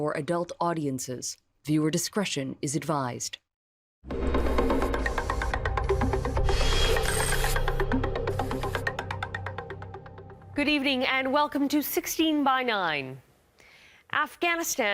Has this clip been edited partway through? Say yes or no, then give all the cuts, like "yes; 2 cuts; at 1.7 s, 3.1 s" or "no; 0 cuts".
yes; 1 cut; at 3.2 s